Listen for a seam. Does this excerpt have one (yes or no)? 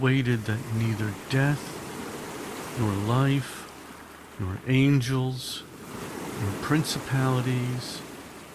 no